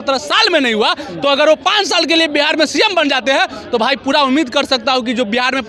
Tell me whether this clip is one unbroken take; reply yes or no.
yes